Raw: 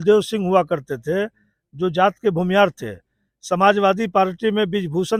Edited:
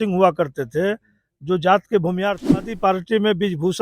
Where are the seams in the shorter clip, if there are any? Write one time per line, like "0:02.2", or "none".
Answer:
0:02.7